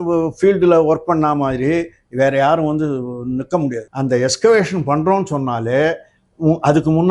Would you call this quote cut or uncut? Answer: cut